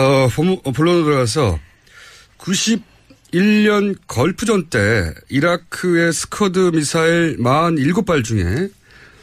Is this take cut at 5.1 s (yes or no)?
no